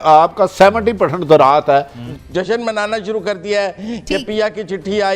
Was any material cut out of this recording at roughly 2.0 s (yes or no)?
yes